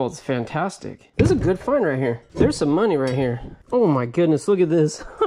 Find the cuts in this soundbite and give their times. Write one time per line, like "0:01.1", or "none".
0:01.0
0:02.2
0:03.5